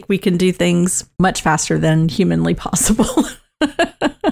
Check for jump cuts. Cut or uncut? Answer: cut